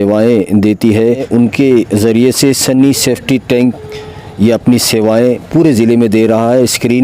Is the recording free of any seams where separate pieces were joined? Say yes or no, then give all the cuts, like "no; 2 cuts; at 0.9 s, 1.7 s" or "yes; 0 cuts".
no; 1 cut; at 1.2 s